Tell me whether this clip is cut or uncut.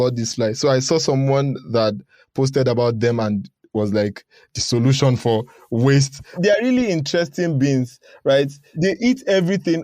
cut